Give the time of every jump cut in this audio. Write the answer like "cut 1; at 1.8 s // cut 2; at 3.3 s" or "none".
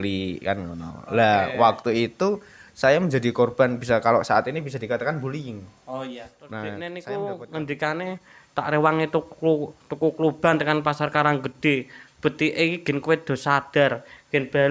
cut 1; at 6.4 s